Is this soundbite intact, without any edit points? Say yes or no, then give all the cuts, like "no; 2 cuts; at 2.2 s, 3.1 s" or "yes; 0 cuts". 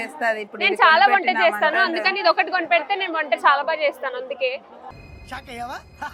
yes; 0 cuts